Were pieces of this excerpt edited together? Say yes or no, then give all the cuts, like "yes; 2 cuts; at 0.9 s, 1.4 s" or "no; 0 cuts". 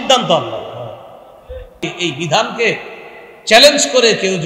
yes; 1 cut; at 1.8 s